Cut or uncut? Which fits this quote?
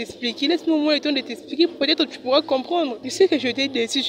cut